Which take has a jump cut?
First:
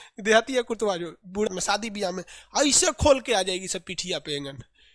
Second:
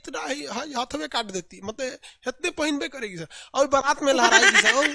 first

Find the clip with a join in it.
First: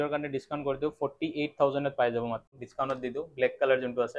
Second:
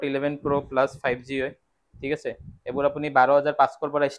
first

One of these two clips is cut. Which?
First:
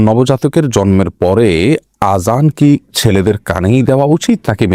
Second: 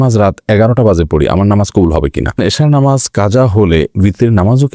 second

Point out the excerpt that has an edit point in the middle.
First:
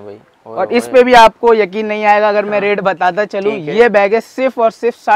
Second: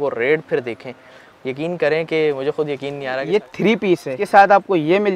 second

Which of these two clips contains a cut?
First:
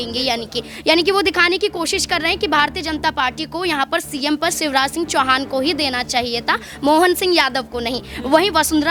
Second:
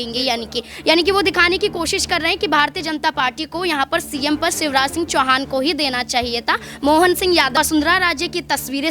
second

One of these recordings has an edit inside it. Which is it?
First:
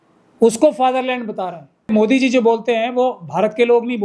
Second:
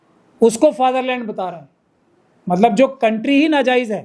first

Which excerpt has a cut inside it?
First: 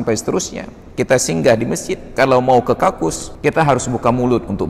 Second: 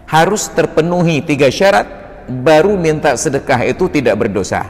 first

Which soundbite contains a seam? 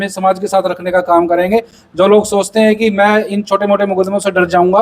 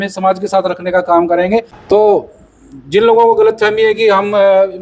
second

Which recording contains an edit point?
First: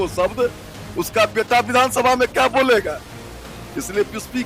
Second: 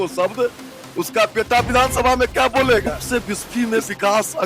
second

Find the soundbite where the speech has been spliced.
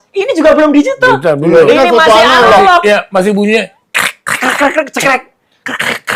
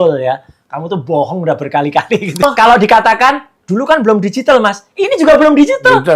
second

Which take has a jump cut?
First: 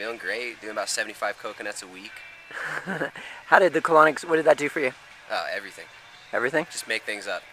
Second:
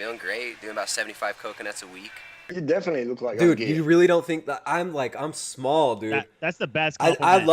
second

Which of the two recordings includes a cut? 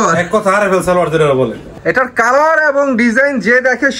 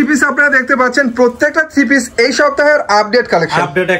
first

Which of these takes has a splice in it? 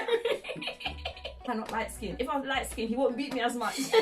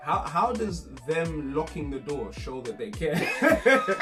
first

